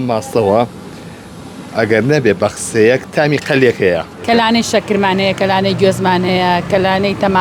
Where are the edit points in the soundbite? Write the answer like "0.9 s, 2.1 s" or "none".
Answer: 4.2 s